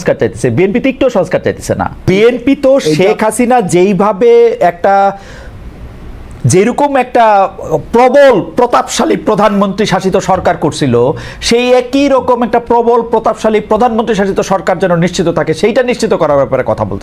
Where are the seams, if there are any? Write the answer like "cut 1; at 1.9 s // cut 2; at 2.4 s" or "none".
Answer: cut 1; at 2.1 s